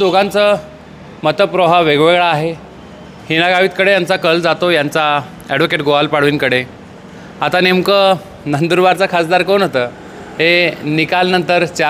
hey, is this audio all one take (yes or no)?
yes